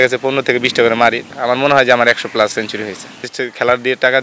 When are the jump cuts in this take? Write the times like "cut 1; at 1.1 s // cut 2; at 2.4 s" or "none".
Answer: cut 1; at 1.3 s // cut 2; at 3.2 s